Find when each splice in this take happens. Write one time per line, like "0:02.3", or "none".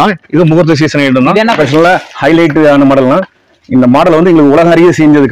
0:01.5